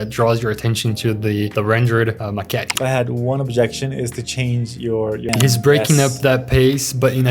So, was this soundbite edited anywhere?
yes; 2 cuts; at 2.7 s, 5.2 s

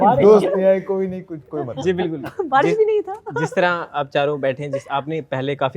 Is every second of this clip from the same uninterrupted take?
yes; 0 cuts

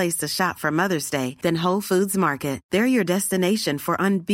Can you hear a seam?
no; 0 cuts

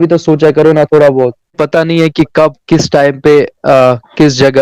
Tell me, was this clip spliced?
yes; 1 cut; at 1.6 s

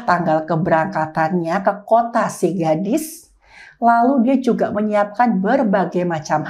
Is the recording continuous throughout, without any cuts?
yes; 0 cuts

